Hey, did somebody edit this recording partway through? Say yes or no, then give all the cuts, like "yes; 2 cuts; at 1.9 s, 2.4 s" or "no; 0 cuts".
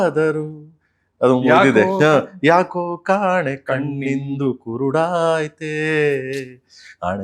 no; 0 cuts